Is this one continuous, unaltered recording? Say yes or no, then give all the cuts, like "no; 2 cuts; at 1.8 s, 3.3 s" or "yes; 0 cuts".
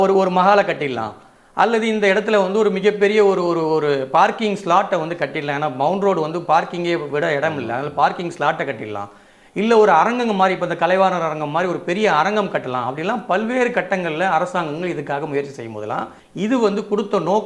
no; 1 cut; at 16.2 s